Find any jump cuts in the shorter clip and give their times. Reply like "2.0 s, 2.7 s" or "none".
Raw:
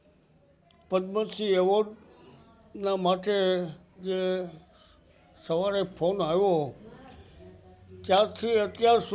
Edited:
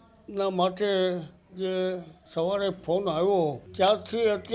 2.1 s, 3.6 s